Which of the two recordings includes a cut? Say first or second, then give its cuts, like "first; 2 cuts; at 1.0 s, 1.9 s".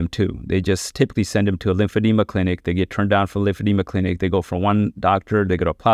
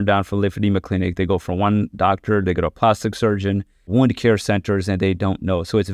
second; 1 cut; at 3.9 s